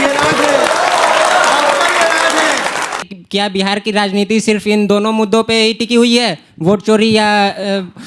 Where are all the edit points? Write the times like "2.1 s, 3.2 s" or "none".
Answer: 3.0 s